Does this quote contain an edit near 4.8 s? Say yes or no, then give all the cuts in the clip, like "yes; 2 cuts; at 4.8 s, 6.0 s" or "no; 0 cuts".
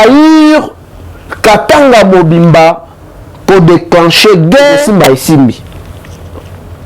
yes; 1 cut; at 4.8 s